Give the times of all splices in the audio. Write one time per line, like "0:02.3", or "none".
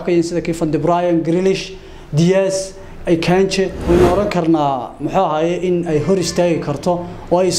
0:03.8